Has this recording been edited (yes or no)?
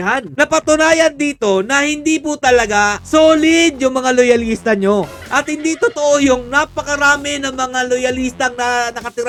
no